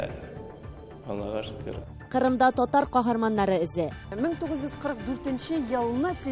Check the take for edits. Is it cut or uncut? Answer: uncut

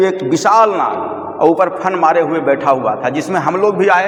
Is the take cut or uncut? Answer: uncut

